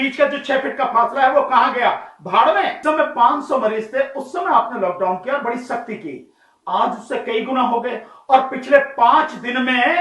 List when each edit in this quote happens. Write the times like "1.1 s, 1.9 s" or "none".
2.8 s